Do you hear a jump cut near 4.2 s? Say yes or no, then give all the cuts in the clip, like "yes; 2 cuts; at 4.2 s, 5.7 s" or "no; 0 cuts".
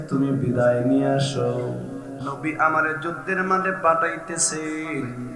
no; 1 cut; at 2.2 s